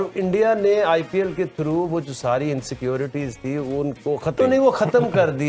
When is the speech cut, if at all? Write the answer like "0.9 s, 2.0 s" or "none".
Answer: 4.4 s